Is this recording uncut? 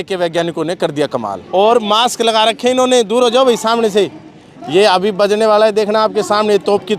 no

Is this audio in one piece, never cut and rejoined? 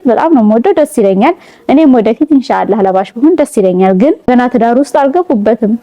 no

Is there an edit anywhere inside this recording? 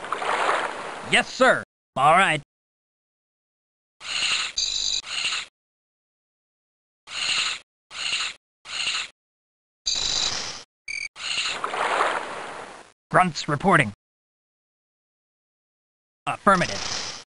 yes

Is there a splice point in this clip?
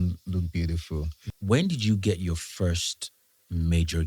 yes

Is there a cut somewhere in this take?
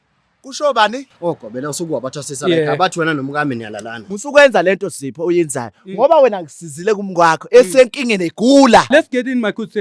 yes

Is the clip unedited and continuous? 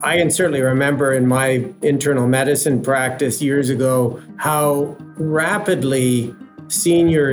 no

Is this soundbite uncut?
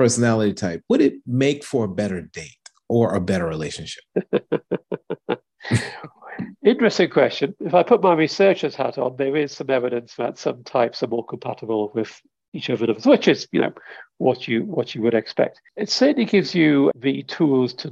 no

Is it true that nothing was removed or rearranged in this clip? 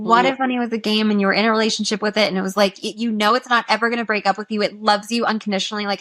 yes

